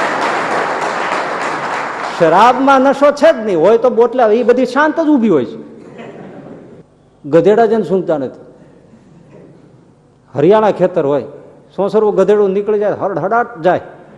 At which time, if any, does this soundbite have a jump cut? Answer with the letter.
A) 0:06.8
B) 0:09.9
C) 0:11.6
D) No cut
A